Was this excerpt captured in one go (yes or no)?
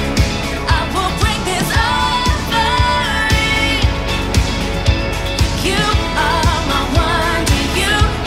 yes